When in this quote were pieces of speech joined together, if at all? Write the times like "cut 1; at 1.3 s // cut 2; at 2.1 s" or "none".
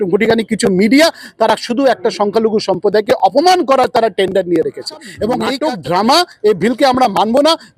cut 1; at 5.5 s